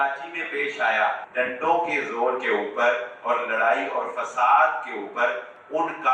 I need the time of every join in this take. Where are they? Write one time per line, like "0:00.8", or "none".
0:01.2